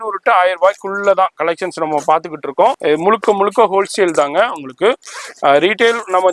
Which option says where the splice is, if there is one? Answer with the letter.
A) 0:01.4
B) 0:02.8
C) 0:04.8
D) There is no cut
B